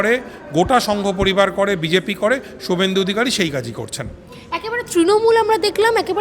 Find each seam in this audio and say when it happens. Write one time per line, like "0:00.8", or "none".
none